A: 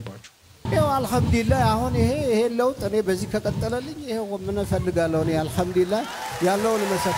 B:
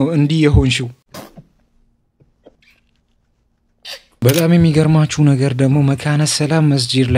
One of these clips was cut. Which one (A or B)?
B